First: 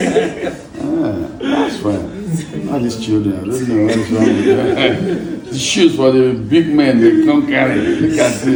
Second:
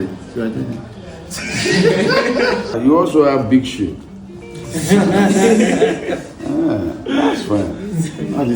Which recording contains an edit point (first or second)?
second